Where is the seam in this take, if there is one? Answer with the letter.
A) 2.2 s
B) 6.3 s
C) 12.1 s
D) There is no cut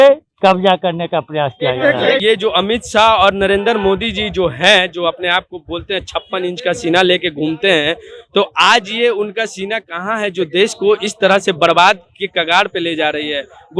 A